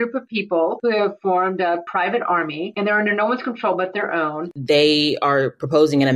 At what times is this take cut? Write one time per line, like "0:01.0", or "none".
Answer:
0:00.8
0:01.9
0:02.7
0:04.5

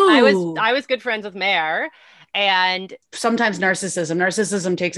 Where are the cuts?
0:03.0

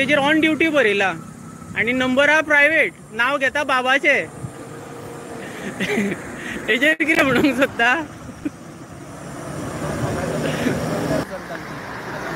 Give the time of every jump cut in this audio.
0:11.2

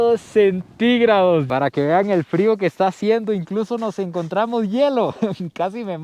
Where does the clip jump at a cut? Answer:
0:01.5

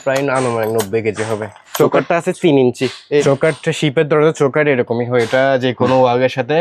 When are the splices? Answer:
0:01.6
0:03.2

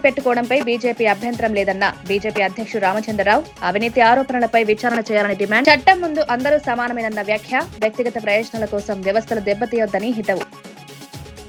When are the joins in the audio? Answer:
none

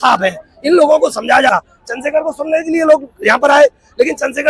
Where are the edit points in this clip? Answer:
0:01.5

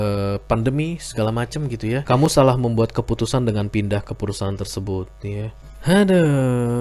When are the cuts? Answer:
0:02.0
0:05.6

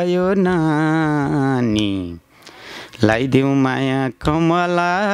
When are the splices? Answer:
none

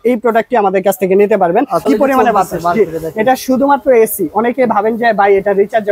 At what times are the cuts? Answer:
0:01.9

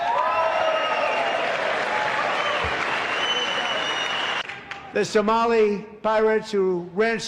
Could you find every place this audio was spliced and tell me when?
0:04.4

